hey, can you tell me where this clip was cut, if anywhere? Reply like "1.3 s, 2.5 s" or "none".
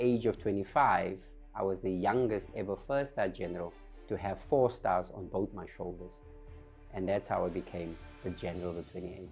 none

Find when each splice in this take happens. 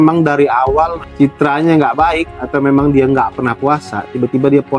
1.0 s

